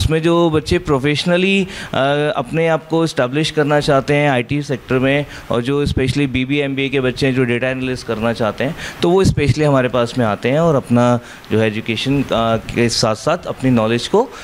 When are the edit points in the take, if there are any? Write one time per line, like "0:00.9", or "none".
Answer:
none